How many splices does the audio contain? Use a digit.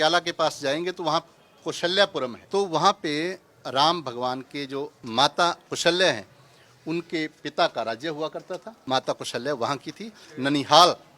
4